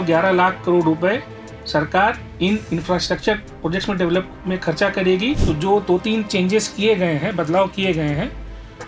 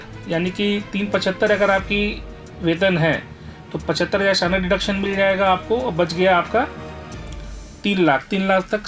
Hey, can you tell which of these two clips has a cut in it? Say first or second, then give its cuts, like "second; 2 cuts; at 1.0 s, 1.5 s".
first; 1 cut; at 5.4 s